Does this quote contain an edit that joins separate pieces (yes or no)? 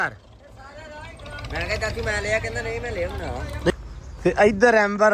yes